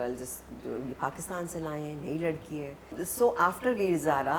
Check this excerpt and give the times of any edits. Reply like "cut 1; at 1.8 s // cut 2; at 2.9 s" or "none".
none